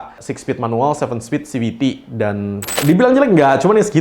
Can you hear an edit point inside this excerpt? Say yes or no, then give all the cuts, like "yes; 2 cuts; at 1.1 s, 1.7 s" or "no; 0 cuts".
yes; 1 cut; at 2.8 s